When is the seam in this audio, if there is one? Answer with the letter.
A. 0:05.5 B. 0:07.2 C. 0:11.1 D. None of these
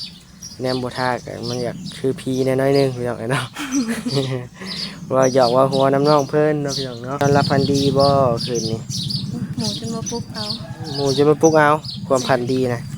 B